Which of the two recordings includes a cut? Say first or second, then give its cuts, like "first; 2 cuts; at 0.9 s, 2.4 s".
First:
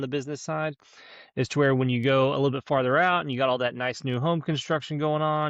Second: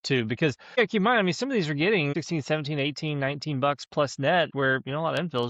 second; 3 cuts; at 0.8 s, 2.1 s, 4.5 s